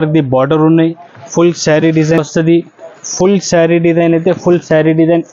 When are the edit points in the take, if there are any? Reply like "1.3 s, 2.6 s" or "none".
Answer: 2.2 s